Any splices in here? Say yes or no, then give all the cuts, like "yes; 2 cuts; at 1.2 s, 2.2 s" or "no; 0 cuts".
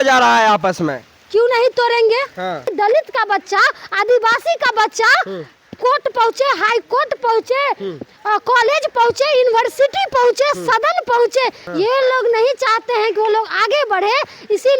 yes; 2 cuts; at 2.7 s, 11.6 s